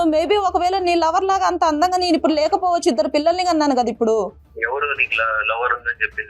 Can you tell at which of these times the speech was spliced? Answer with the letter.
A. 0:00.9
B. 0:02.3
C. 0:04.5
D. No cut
C